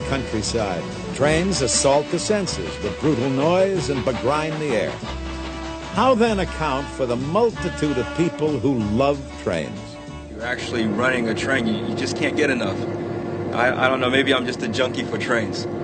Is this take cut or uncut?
cut